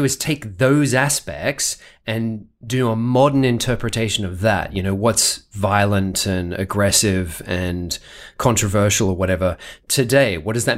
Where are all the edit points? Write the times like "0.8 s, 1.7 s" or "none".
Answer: none